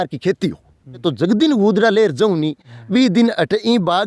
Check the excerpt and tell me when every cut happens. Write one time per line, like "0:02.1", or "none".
0:01.0